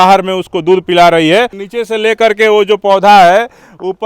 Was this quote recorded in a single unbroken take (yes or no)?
no